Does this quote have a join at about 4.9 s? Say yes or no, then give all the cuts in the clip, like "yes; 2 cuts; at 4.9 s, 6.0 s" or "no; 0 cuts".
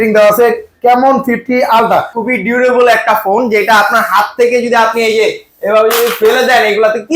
no; 1 cut; at 2.2 s